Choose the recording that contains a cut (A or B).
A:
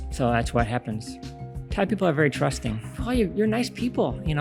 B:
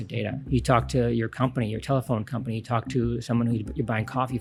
A